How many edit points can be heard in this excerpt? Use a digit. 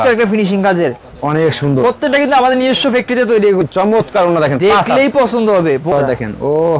2